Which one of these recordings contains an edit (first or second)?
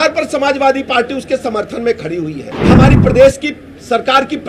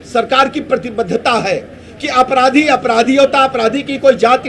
first